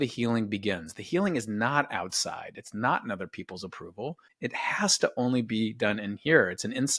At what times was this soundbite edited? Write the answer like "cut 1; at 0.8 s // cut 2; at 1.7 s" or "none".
cut 1; at 4.3 s